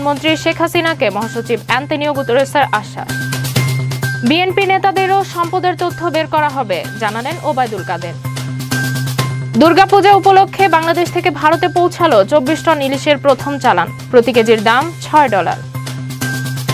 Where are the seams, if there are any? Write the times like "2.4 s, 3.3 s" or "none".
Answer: 3.1 s